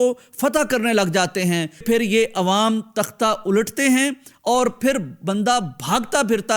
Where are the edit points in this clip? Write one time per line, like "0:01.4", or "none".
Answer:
0:01.8